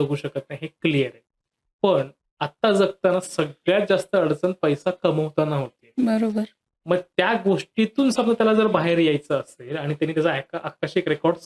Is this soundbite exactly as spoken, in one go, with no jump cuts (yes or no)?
yes